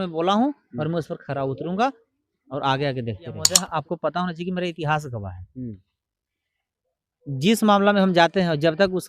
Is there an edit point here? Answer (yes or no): yes